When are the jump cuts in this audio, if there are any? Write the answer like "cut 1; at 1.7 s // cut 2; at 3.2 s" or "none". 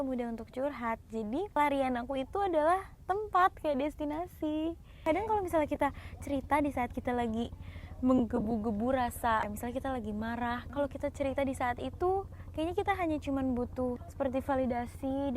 cut 1; at 1.6 s // cut 2; at 4.9 s // cut 3; at 9.5 s // cut 4; at 10.6 s // cut 5; at 14.0 s